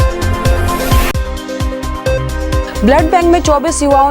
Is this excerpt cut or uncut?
cut